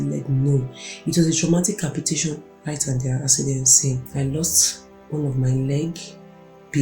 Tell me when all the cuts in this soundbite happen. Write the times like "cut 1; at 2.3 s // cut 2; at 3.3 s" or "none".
cut 1; at 4.1 s

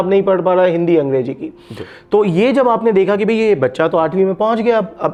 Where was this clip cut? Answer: none

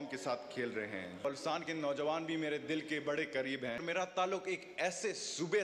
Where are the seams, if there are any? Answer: cut 1; at 1.2 s // cut 2; at 3.8 s

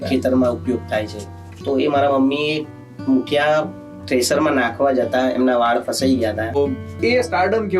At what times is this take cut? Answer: cut 1; at 6.6 s

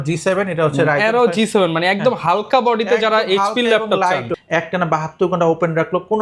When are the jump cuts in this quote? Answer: cut 1; at 4.3 s

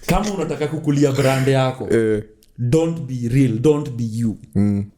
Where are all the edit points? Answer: none

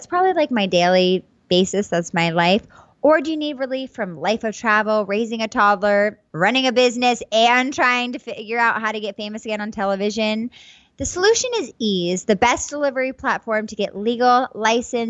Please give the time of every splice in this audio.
cut 1; at 6.2 s

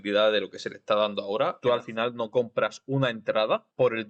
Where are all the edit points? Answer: cut 1; at 1.6 s

